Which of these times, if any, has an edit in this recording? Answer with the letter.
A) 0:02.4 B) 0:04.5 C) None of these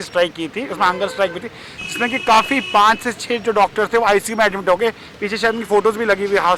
C